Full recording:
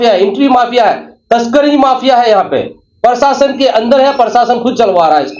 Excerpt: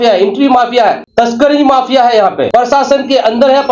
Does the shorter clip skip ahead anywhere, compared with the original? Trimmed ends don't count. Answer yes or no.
yes